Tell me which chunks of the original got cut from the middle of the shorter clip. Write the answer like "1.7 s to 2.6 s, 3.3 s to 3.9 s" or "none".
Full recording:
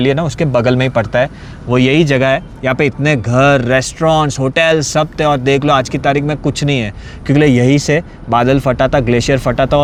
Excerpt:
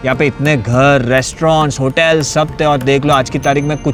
none